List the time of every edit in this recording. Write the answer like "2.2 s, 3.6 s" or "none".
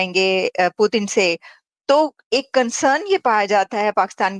none